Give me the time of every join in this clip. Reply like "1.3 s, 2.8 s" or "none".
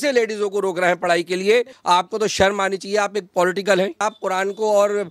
1.7 s, 4.0 s